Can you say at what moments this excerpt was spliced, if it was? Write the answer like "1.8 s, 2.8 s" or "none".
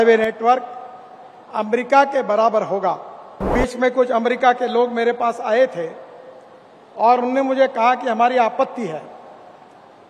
3.5 s